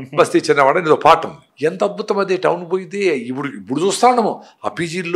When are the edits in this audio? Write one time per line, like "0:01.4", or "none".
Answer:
0:01.5